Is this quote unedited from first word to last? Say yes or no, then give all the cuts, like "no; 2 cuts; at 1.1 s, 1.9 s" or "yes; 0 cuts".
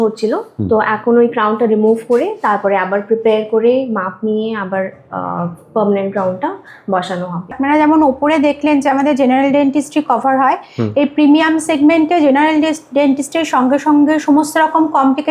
yes; 0 cuts